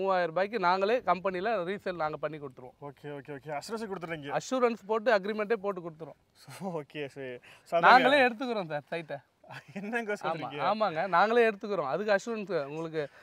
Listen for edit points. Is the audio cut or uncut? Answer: uncut